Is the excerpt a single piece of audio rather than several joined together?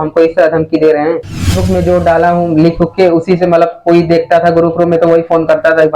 no; 1 cut; at 1.6 s

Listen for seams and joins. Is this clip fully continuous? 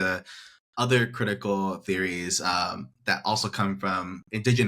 yes; 0 cuts

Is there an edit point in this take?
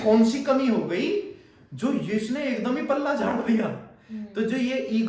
no; 0 cuts

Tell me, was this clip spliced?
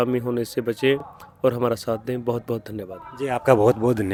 no; 0 cuts

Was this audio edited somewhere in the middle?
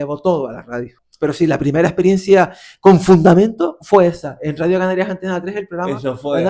yes; 1 cut; at 1.0 s

